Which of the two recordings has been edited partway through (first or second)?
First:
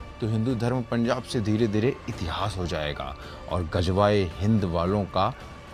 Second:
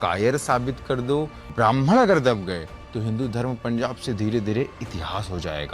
second